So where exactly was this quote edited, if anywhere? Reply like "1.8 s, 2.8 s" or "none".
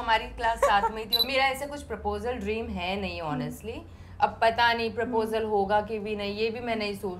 1.2 s